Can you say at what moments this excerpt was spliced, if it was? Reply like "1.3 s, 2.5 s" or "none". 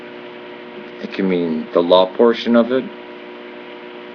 2.4 s